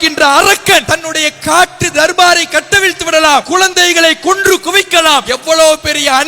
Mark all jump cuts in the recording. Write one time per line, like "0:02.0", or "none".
0:00.9
0:03.5
0:05.3